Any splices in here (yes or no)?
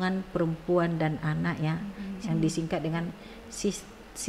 yes